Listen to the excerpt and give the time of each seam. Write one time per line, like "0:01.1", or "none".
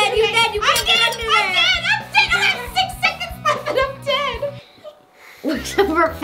none